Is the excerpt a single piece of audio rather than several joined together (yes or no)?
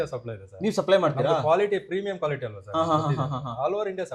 yes